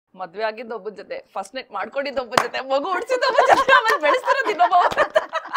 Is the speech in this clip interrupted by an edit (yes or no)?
no